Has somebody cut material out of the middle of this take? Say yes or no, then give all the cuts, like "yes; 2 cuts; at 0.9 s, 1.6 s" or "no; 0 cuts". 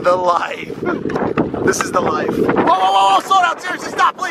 yes; 1 cut; at 1.4 s